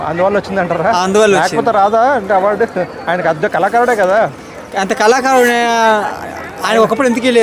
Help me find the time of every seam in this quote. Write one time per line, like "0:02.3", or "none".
none